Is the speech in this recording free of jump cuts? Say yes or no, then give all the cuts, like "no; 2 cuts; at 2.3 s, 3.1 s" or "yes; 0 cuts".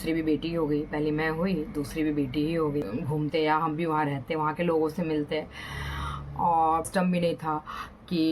no; 2 cuts; at 2.9 s, 6.9 s